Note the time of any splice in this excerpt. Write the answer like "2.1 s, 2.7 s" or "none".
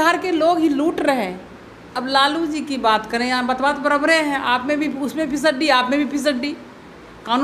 2.0 s